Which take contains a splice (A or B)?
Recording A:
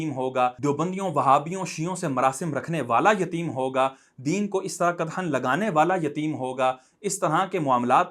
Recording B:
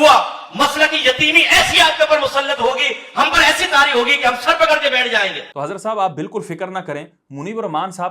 B